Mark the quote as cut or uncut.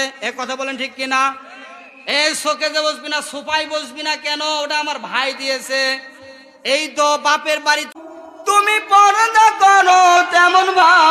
cut